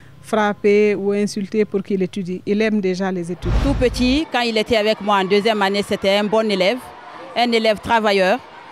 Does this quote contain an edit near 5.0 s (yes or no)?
no